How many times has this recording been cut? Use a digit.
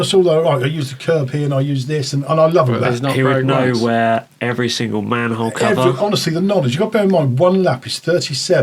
0